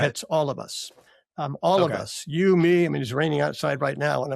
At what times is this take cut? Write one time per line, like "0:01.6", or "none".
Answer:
none